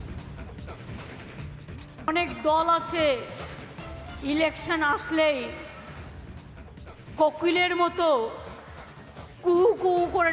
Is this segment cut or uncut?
cut